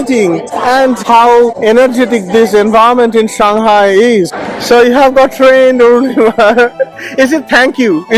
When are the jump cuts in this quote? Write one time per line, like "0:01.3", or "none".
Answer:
0:01.0
0:04.4